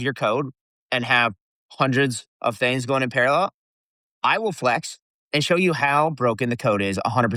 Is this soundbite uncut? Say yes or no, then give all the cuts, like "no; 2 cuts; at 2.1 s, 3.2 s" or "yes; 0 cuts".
yes; 0 cuts